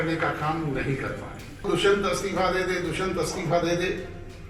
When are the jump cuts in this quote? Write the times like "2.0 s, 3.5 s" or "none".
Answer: 1.6 s